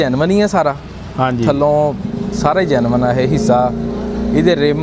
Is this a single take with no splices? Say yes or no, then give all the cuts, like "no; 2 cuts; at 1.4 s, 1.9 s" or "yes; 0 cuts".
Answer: yes; 0 cuts